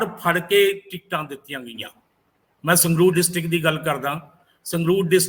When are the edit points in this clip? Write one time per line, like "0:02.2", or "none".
none